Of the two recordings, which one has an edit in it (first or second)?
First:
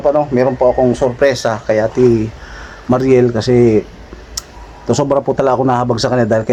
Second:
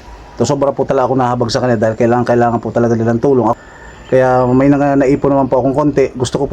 second